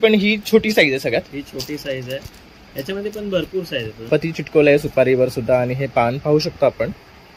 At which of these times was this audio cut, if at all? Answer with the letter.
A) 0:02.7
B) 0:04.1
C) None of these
B